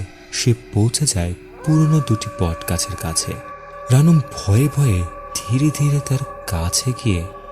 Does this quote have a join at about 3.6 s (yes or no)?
yes